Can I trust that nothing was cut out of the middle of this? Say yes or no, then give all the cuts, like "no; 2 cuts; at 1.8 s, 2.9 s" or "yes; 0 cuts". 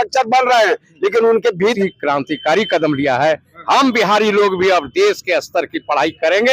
no; 1 cut; at 1.8 s